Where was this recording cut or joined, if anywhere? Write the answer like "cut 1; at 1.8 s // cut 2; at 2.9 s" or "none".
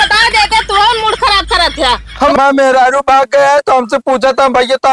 cut 1; at 2.1 s